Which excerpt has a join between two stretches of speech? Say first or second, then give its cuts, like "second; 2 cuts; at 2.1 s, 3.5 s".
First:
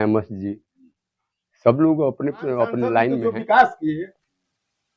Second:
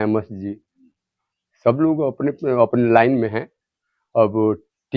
first; 1 cut; at 3.2 s